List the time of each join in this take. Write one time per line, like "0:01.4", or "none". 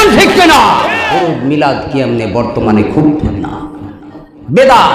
0:01.0